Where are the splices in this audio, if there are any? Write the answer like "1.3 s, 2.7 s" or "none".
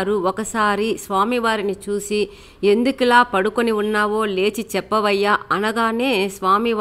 none